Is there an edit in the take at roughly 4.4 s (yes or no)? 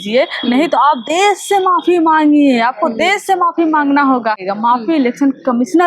yes